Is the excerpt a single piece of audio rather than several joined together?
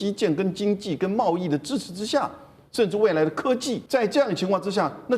no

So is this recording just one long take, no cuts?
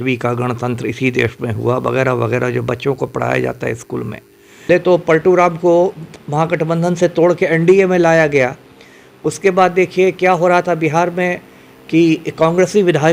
no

